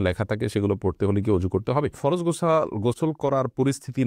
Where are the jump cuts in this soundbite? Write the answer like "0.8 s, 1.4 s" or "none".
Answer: 2.0 s